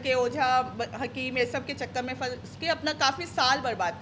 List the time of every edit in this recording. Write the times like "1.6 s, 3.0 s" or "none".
none